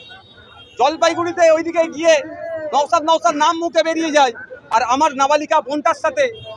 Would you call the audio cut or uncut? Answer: uncut